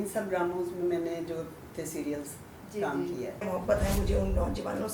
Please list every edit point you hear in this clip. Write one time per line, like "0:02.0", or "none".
0:03.4